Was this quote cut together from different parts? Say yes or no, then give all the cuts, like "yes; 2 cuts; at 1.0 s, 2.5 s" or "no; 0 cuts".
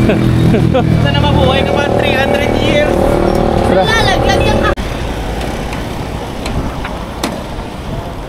no; 0 cuts